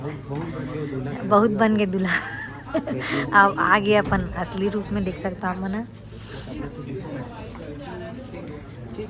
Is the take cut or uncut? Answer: uncut